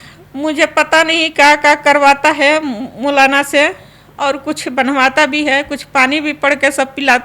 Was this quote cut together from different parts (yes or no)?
no